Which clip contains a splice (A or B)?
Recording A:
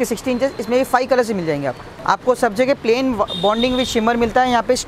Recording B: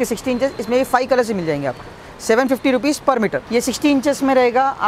A